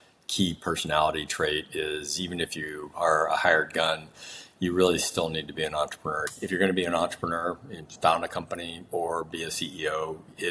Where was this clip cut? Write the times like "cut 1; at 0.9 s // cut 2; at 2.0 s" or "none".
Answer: cut 1; at 6.3 s